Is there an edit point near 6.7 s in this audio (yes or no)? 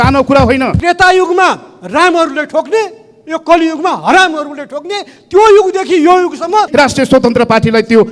yes